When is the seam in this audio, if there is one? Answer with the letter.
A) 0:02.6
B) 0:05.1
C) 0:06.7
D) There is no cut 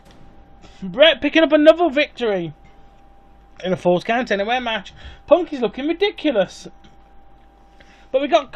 C